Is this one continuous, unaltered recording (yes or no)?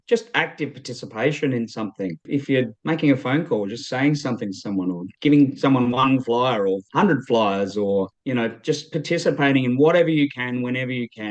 no